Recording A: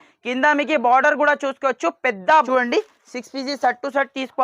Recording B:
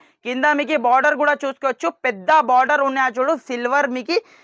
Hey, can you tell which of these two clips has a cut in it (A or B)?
A